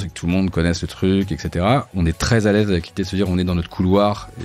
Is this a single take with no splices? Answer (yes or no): no